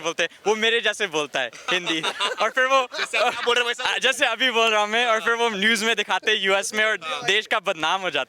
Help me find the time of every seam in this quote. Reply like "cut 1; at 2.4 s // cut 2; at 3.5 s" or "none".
none